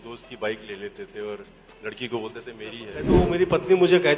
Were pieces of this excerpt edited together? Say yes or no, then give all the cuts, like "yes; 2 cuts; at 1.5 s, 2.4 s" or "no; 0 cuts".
yes; 1 cut; at 3.1 s